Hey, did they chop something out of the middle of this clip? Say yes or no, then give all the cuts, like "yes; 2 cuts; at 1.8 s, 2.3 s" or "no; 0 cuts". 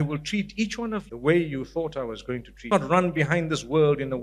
yes; 2 cuts; at 1.1 s, 2.7 s